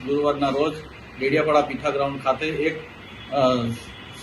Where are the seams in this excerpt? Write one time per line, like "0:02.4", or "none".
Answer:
none

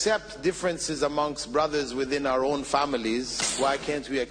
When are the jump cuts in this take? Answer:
0:03.4

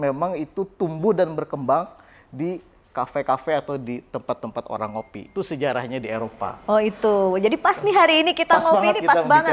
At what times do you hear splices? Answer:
none

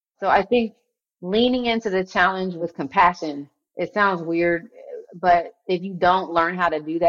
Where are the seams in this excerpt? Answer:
none

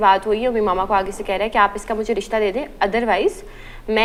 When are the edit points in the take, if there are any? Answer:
none

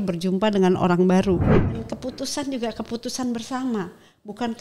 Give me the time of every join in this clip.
0:01.6

